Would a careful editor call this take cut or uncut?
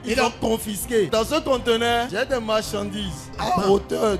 cut